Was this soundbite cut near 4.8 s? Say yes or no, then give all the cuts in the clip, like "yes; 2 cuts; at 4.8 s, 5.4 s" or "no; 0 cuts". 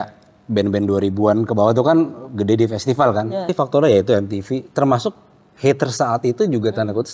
no; 1 cut; at 3.5 s